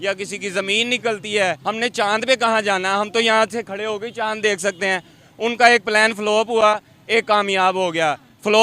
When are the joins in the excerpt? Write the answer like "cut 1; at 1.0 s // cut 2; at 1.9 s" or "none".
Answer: cut 1; at 1.6 s